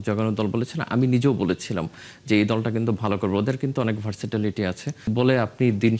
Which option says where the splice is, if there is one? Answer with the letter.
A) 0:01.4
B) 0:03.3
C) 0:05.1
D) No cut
C